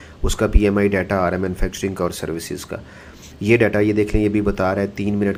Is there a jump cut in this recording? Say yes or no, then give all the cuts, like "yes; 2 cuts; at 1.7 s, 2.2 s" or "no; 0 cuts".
no; 0 cuts